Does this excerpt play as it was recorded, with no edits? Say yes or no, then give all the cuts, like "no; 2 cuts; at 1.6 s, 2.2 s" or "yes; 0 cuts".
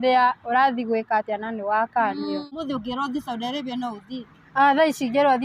no; 1 cut; at 2.6 s